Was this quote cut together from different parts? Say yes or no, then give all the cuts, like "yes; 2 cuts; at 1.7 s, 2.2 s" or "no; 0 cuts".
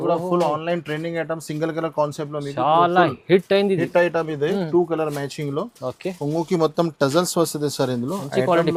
no; 0 cuts